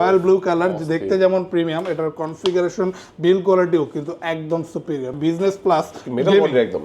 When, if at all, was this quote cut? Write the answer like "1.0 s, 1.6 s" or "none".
5.1 s